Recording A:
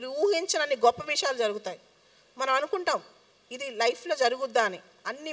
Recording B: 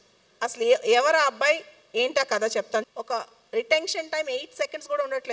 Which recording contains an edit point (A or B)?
B